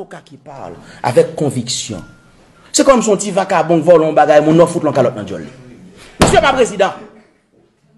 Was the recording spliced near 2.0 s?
no; 0 cuts

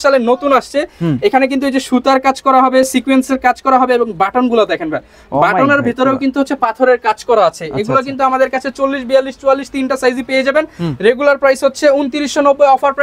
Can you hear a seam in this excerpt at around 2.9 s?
no; 0 cuts

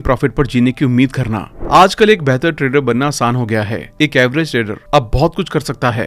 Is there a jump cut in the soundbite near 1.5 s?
yes; 1 cut; at 1.5 s

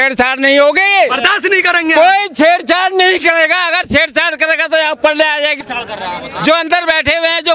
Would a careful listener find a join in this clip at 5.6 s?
no; 0 cuts

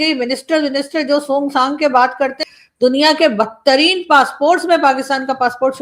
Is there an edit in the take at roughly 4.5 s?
no; 1 cut; at 2.4 s

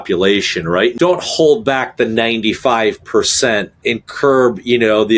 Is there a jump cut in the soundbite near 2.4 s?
no; 2 cuts; at 0.9 s, 3.8 s

